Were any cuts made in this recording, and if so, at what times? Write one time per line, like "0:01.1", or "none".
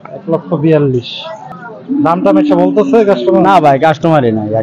0:01.4

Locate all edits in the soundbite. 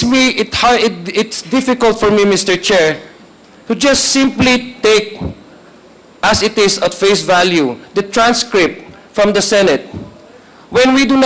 none

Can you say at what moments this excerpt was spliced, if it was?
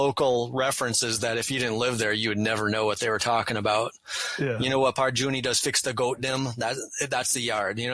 none

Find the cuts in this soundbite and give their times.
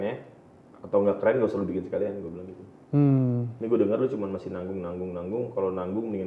none

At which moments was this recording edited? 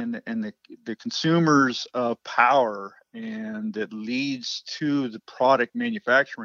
none

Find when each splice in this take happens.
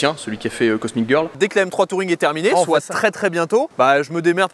0:01.4
0:03.7

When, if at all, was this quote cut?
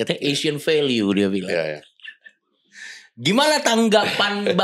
none

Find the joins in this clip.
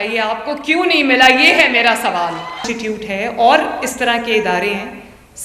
0:02.7

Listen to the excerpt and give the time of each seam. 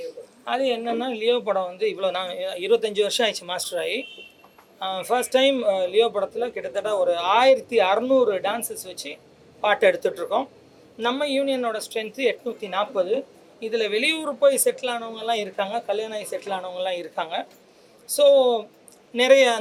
none

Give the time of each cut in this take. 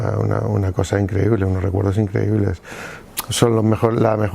none

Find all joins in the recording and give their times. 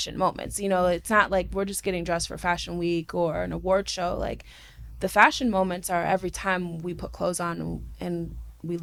none

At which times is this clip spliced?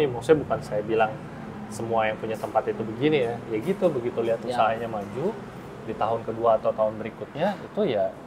none

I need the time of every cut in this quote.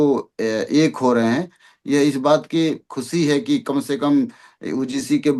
none

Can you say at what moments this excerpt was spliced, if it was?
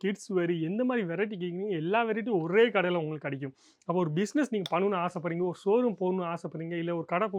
none

